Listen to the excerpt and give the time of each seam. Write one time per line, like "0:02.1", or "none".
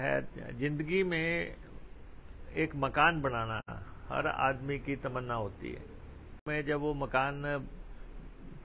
0:06.5